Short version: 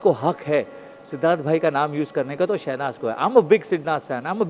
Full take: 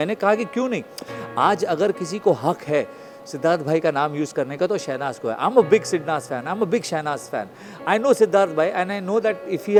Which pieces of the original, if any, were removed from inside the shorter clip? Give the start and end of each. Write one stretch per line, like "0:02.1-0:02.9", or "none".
none